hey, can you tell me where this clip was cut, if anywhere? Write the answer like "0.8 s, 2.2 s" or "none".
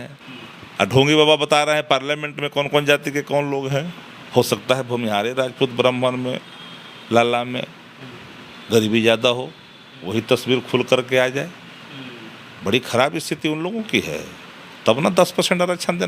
4.1 s

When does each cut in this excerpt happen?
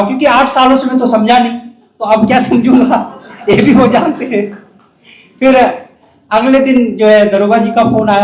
none

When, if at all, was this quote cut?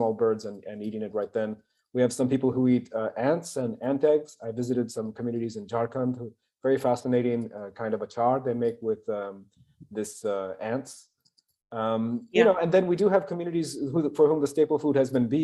none

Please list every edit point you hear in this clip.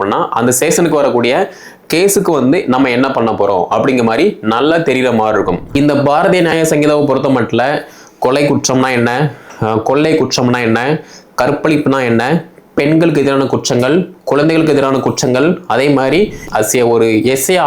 5.6 s, 16.4 s

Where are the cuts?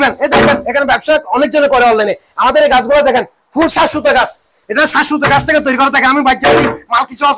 none

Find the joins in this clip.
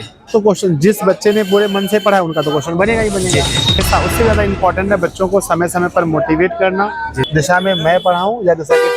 3.8 s, 7.2 s

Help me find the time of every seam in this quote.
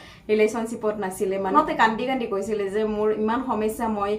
1.5 s

